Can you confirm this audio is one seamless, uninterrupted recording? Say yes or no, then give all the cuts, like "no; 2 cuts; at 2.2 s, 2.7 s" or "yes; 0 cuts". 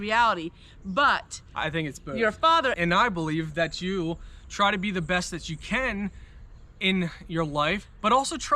no; 1 cut; at 2.7 s